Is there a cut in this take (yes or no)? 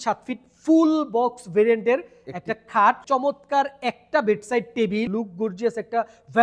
yes